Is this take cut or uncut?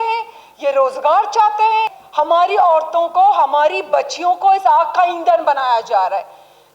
cut